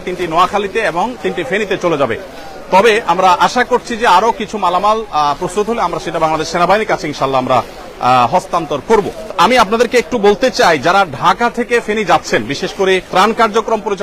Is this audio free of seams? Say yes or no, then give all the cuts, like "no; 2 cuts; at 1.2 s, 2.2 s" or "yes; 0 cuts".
yes; 0 cuts